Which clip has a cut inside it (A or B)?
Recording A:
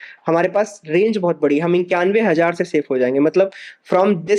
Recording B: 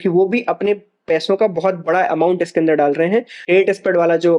B